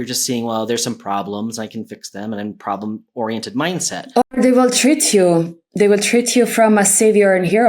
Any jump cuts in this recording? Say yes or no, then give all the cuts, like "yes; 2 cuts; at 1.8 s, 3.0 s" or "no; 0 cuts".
yes; 1 cut; at 4.0 s